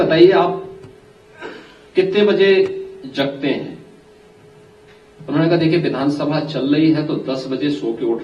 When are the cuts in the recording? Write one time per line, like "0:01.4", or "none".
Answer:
none